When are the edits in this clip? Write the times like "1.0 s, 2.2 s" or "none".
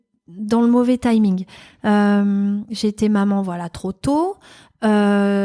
none